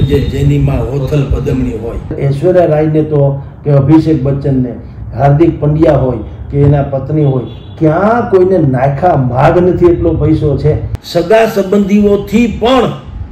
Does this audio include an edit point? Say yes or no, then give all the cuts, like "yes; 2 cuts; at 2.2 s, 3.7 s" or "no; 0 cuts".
yes; 2 cuts; at 2.2 s, 10.9 s